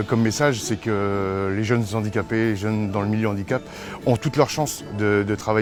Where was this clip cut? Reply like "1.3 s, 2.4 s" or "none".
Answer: none